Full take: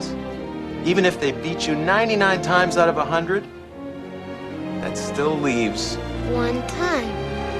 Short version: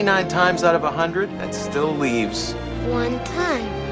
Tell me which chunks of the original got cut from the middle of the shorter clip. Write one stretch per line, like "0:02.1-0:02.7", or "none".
0:03.5-0:04.8